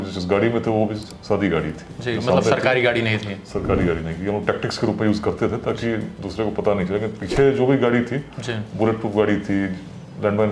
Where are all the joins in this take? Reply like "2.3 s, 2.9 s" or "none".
none